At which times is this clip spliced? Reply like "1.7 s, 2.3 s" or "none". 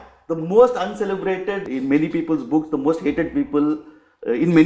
1.6 s

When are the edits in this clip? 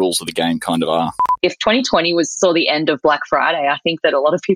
1.2 s

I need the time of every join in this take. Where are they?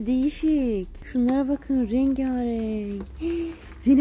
0.9 s

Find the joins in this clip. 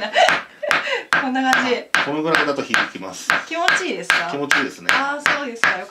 none

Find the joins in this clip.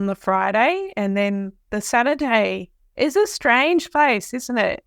none

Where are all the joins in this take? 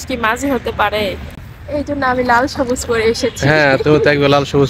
1.2 s

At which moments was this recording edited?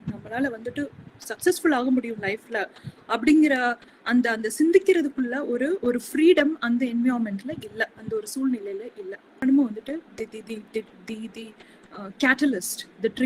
9.4 s

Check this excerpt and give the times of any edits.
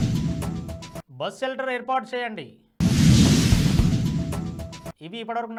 none

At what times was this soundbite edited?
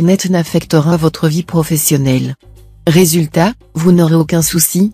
none

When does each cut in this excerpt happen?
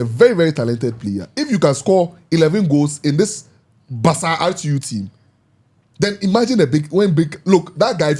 none

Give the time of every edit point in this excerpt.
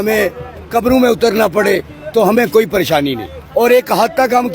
3.6 s

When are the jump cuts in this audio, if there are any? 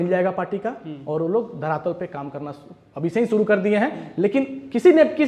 none

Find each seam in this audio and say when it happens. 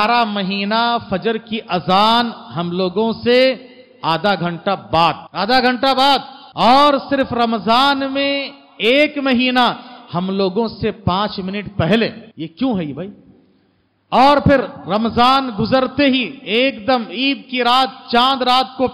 5.3 s, 6.4 s, 12.2 s

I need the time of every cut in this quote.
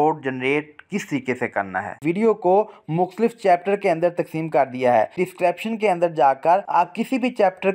2.0 s, 5.1 s, 6.7 s

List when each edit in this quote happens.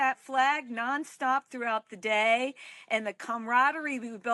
none

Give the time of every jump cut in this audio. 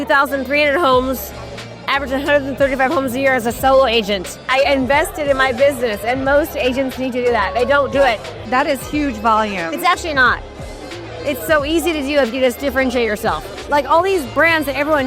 4.4 s, 8.3 s, 13.6 s

